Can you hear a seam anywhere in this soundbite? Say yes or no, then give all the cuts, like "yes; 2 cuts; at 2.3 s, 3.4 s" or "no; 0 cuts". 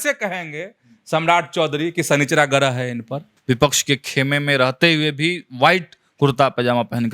yes; 1 cut; at 3.3 s